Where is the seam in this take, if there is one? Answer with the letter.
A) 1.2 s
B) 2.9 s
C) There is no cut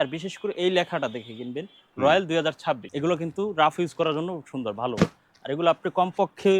B